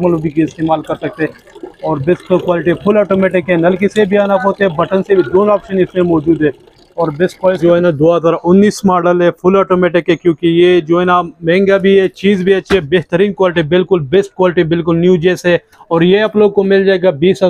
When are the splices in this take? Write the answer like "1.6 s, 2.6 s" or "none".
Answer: 7.6 s

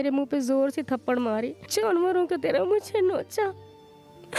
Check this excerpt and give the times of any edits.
1.6 s

